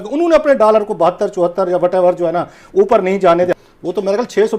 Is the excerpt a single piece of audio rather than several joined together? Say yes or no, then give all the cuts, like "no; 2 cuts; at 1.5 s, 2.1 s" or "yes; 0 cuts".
no; 1 cut; at 3.6 s